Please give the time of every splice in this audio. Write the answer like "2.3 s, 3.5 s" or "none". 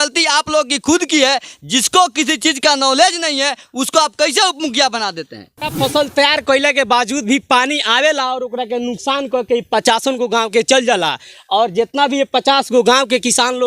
5.6 s